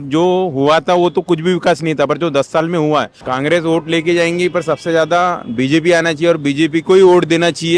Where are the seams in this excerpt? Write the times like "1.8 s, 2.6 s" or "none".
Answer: 3.2 s